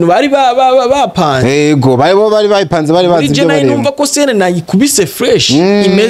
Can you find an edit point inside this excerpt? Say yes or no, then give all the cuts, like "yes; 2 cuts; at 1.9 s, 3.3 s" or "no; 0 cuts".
no; 0 cuts